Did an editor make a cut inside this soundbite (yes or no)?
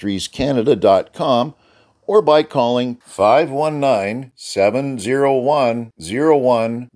no